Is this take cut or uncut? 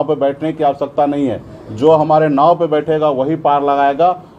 uncut